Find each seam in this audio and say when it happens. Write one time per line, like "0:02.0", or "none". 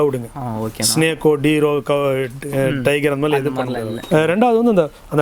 0:03.9